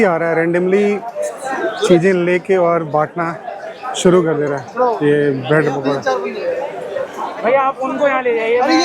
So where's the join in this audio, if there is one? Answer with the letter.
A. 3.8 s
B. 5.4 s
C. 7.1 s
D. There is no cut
D